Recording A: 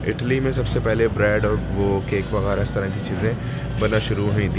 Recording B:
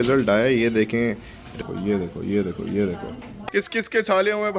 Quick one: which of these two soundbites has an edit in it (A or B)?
B